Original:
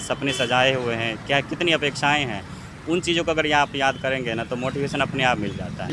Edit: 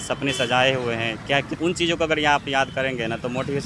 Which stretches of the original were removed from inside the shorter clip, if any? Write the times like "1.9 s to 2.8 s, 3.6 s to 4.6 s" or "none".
1.5 s to 2.8 s